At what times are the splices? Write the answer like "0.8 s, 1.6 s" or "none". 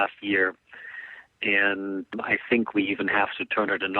2.1 s